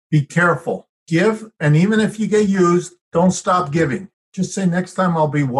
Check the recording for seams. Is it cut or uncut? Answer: cut